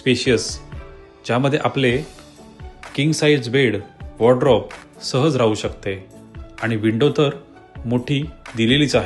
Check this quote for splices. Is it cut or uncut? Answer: uncut